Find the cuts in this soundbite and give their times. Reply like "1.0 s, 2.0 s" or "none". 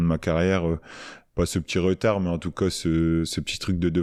none